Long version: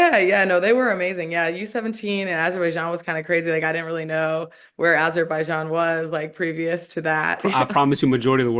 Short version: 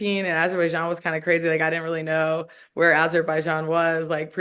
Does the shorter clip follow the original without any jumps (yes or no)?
yes